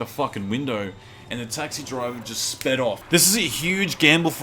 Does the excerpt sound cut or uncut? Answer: cut